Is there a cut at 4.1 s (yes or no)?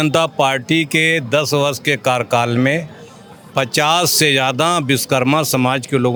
no